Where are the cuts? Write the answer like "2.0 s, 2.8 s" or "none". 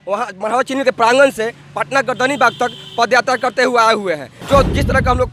4.4 s